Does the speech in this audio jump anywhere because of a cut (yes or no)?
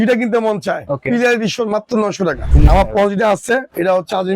yes